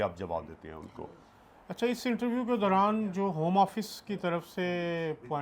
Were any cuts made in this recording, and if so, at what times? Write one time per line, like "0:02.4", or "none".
none

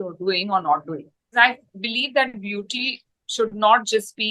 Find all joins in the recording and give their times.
0:01.3

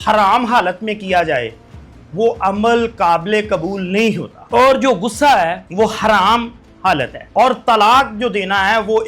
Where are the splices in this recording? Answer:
0:04.3
0:05.6
0:07.2

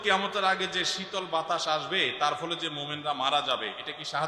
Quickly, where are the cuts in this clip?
none

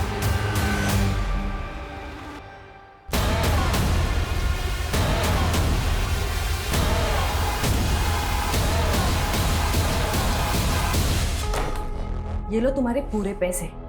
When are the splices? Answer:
0:11.4

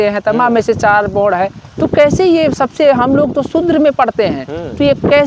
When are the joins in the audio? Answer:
none

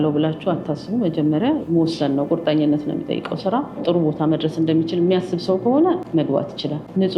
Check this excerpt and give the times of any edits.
0:01.6
0:03.8
0:06.2

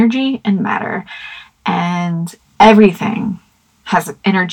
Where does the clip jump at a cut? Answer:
0:02.4

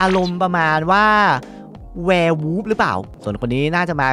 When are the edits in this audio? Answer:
0:03.1

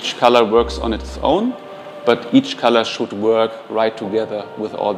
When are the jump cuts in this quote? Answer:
none

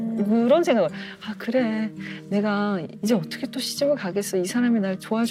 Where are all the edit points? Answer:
none

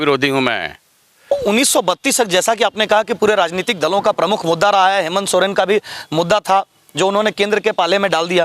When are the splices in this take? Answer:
0:01.3

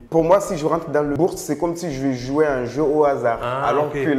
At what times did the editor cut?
0:01.1

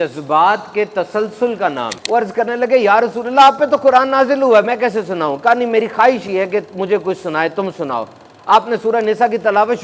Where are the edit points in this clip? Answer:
0:02.0

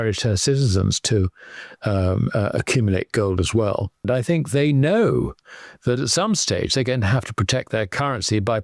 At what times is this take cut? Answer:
0:04.0

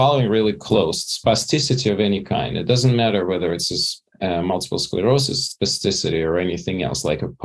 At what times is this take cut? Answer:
none

